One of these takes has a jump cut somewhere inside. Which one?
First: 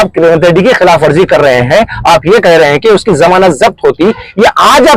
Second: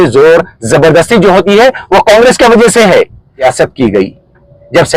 second; 1 cut; at 3.3 s

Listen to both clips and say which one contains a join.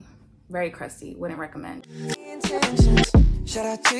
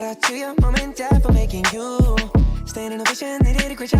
first; 1 cut; at 2.2 s

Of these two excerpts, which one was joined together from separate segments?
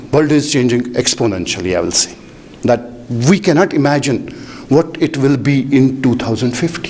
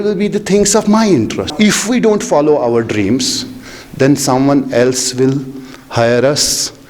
second; 1 cut; at 1.5 s

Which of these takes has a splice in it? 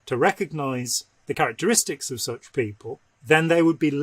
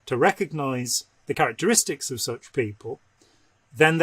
first; 1 cut; at 3.1 s

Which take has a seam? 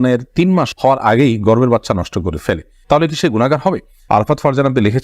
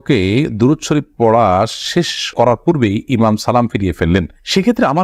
first; 1 cut; at 3.9 s

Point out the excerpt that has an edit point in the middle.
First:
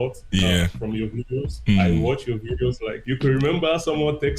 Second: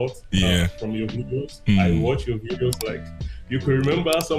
first; 1 cut; at 2.9 s

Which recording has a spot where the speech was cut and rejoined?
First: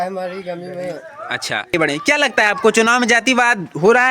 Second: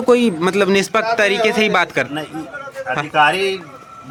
first; 1 cut; at 1.7 s

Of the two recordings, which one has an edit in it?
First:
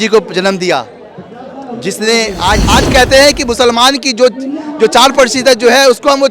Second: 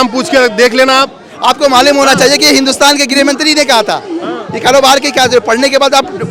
first; 1 cut; at 2.6 s

